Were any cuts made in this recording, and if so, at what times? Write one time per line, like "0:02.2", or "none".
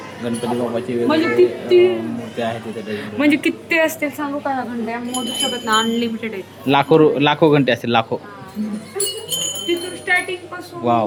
none